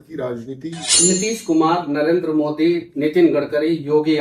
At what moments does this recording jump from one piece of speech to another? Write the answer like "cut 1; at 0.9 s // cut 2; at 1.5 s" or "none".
cut 1; at 0.9 s